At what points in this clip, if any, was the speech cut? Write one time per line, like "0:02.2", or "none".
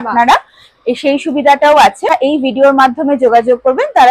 0:02.1